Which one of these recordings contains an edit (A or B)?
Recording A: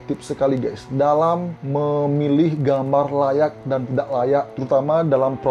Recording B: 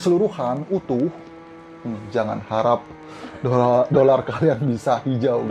A